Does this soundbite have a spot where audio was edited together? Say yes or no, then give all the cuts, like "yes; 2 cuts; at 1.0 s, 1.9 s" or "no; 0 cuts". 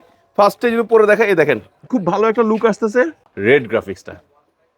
yes; 1 cut; at 3.2 s